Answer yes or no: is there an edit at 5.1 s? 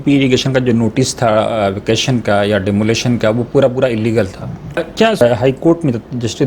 yes